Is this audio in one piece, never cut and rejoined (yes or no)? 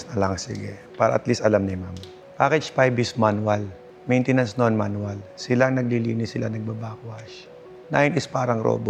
yes